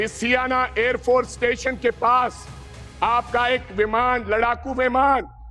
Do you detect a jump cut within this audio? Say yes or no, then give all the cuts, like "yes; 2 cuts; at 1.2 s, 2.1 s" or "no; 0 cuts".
no; 0 cuts